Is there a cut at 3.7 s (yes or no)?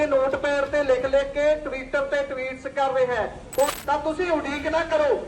yes